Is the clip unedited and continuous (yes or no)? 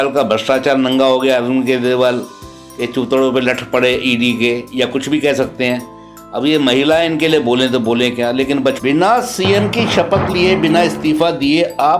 no